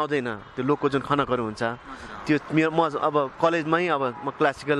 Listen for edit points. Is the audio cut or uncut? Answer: uncut